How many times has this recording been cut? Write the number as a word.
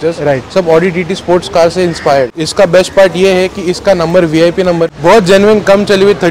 two